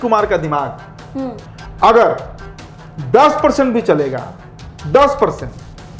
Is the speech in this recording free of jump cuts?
yes; 0 cuts

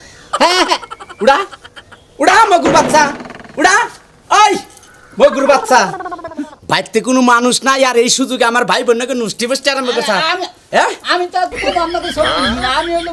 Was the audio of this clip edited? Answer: no; 0 cuts

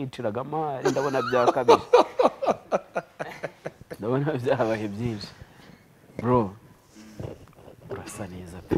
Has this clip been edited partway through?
no; 0 cuts

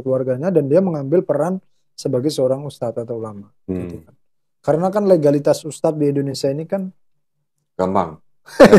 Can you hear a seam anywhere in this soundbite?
no; 0 cuts

